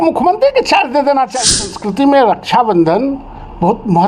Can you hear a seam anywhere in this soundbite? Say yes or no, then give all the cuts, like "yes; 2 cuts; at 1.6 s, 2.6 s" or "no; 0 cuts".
yes; 1 cut; at 1.4 s